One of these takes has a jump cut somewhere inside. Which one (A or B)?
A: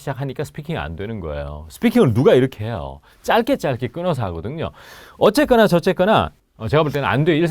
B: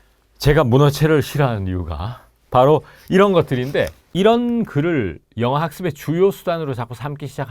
A